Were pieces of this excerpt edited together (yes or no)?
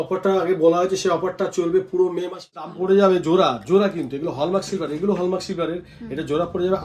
yes